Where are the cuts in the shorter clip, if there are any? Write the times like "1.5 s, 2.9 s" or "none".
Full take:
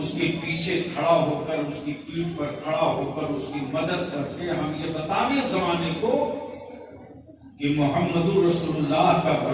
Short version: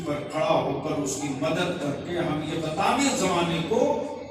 none